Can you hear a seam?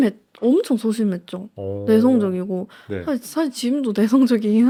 no; 0 cuts

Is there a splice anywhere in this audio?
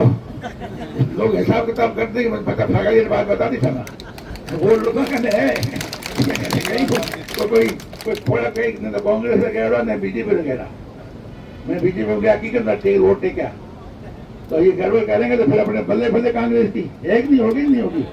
no; 0 cuts

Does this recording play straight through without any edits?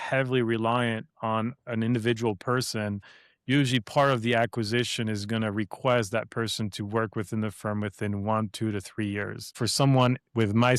no; 1 cut; at 9.6 s

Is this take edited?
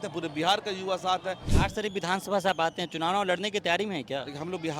yes; 1 cut; at 1.5 s

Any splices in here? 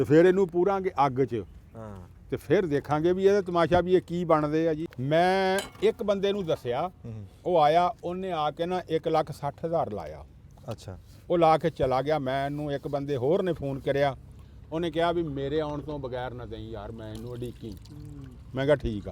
yes; 1 cut; at 4.9 s

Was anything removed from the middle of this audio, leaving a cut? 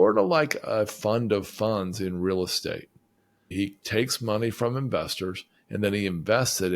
yes; 1 cut; at 3.5 s

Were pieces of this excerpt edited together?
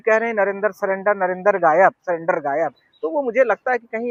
no; 0 cuts

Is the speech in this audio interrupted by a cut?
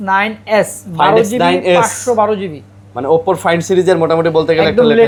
no; 0 cuts

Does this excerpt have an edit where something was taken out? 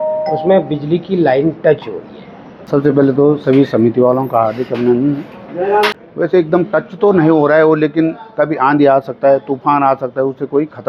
yes; 2 cuts; at 2.6 s, 6.0 s

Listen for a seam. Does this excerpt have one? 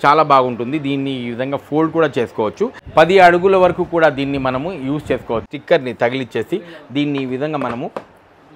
yes; 2 cuts; at 2.8 s, 5.4 s

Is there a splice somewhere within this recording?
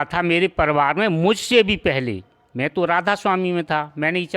no; 0 cuts

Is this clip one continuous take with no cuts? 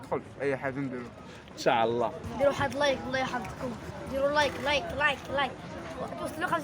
no; 1 cut; at 2.2 s

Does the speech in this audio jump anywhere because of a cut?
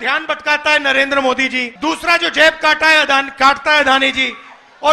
yes; 1 cut; at 1.7 s

